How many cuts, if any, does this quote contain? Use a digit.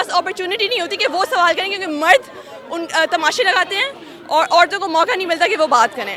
0